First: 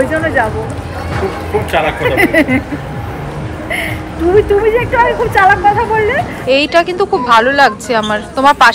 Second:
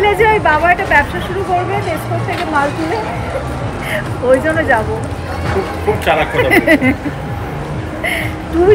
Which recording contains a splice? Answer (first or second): first